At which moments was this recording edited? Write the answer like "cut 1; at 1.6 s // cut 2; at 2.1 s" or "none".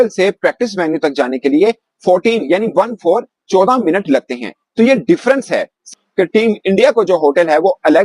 cut 1; at 5.9 s